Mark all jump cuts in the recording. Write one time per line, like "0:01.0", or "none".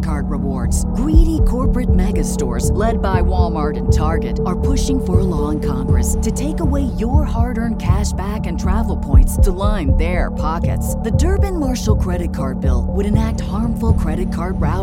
none